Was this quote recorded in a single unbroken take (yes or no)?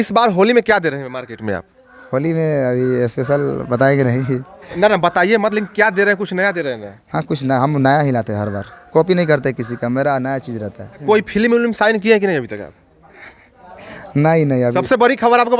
no